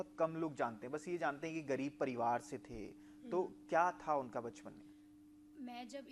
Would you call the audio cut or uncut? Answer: uncut